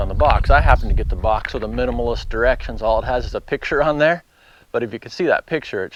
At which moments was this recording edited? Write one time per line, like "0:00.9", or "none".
none

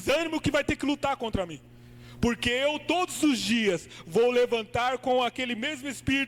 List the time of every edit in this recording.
none

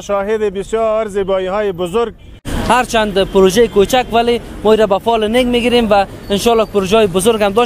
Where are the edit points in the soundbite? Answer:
0:02.5

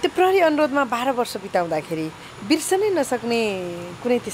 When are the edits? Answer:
none

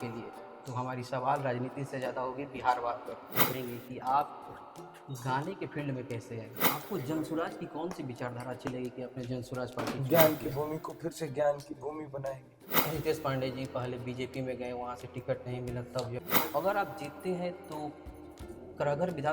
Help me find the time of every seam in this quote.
0:03.5
0:06.6
0:10.0
0:12.8
0:16.3

